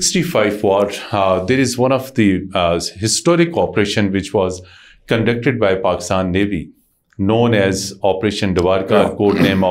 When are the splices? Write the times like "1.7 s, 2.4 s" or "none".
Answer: none